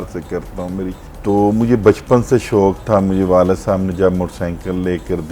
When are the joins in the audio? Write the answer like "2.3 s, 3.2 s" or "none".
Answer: 1.0 s